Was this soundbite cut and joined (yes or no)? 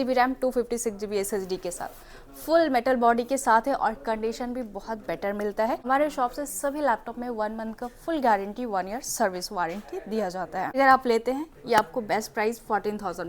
yes